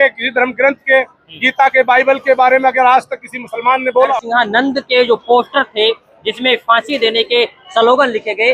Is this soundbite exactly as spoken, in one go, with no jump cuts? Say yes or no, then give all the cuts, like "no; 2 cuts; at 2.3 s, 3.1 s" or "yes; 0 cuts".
no; 1 cut; at 4.1 s